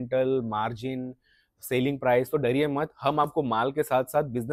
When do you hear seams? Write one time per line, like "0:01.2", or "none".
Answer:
none